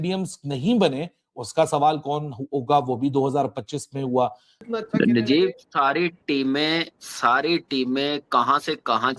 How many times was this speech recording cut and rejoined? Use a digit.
1